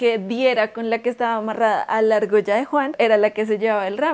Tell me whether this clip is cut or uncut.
cut